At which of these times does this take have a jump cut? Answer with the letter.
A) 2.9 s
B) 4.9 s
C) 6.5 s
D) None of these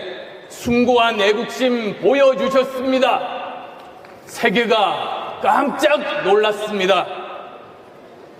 A